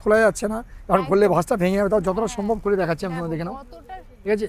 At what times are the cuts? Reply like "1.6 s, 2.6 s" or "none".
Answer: none